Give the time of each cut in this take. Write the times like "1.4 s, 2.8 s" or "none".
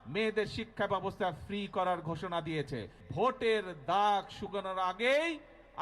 3.0 s